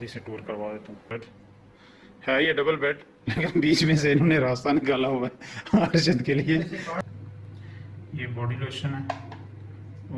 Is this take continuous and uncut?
no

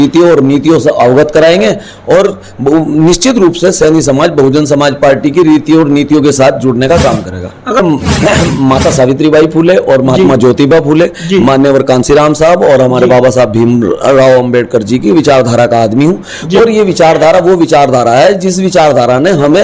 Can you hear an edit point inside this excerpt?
yes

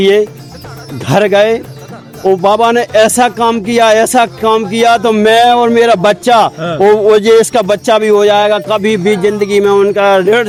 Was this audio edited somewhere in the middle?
no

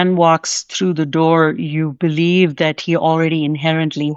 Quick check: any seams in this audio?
no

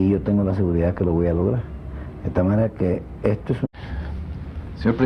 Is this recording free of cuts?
yes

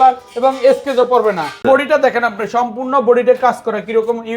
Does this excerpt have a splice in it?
yes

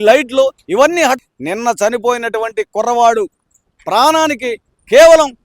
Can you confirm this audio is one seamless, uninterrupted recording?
no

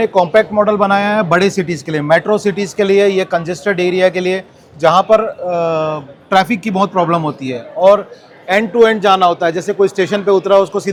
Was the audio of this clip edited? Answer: no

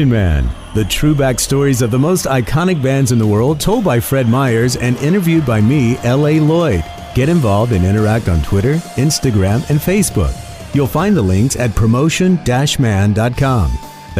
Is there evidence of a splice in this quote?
no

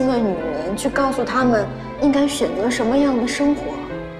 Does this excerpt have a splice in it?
yes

